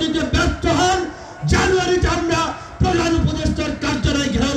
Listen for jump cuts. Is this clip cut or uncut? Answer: uncut